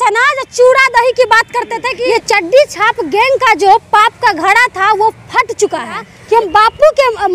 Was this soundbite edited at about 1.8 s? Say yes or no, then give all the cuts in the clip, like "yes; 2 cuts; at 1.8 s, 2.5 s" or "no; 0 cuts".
yes; 2 cuts; at 1.8 s, 6.1 s